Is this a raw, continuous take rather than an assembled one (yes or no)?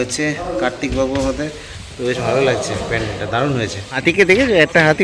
yes